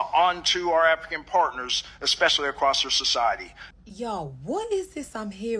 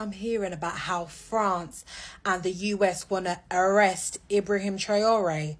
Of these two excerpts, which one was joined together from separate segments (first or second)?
first